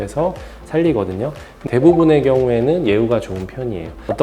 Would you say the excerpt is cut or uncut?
cut